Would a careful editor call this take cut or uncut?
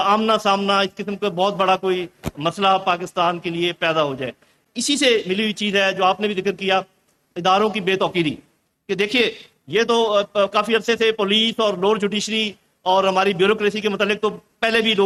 uncut